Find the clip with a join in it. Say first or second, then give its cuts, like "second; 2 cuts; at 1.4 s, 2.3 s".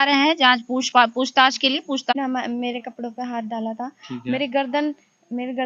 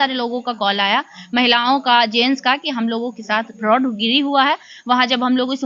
first; 1 cut; at 2.1 s